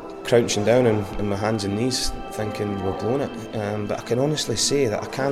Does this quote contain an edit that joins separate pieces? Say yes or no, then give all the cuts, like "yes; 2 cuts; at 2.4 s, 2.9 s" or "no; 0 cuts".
no; 0 cuts